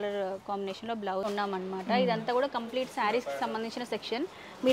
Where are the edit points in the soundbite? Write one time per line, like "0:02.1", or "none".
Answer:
0:01.3